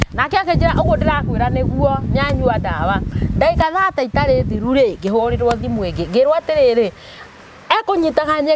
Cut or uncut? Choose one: uncut